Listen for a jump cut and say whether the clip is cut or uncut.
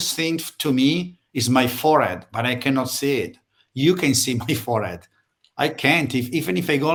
uncut